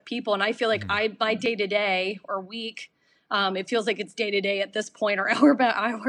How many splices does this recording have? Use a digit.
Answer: 0